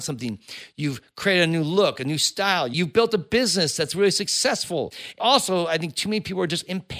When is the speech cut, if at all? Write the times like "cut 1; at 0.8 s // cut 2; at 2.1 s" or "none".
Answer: cut 1; at 2.7 s // cut 2; at 5.2 s